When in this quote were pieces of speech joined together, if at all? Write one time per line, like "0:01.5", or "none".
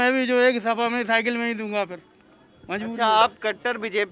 none